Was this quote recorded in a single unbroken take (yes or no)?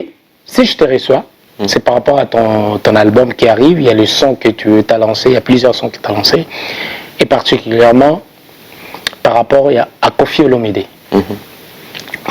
yes